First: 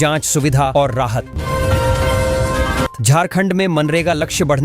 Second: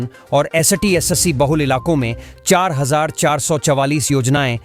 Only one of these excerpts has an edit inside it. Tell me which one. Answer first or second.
first